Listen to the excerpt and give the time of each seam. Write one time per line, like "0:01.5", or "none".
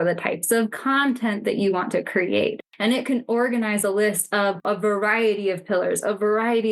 0:02.7
0:04.6